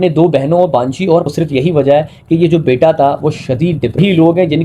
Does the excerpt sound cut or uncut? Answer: cut